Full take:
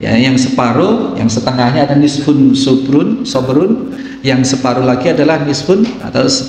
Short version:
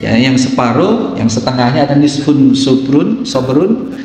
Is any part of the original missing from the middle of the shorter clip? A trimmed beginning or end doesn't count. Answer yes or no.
no